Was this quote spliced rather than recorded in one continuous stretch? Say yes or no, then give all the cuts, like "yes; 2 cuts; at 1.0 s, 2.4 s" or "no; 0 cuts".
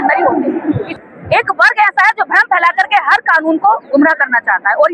yes; 1 cut; at 0.9 s